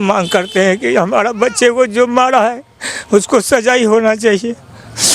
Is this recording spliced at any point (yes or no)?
no